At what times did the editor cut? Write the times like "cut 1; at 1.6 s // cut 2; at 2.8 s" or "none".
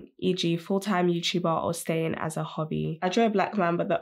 cut 1; at 3.0 s